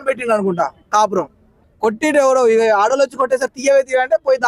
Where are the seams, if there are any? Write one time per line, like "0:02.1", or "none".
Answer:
0:01.6